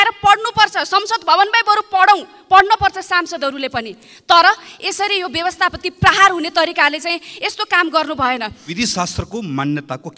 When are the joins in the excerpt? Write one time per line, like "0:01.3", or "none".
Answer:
0:08.7